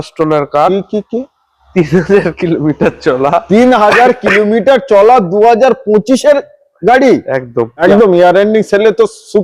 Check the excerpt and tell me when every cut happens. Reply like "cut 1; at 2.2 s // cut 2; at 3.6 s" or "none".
cut 1; at 7.7 s